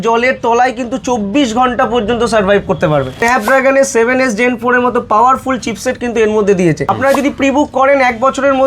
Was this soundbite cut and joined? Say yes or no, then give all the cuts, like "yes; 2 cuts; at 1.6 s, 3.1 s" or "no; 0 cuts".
yes; 2 cuts; at 3.1 s, 6.9 s